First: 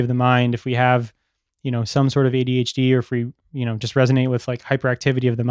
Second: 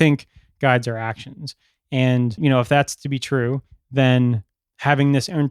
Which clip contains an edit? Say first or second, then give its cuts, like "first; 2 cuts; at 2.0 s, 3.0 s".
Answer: second; 1 cut; at 2.4 s